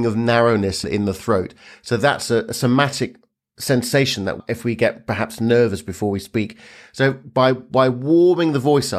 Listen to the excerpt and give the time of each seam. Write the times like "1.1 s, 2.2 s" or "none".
0.8 s, 4.4 s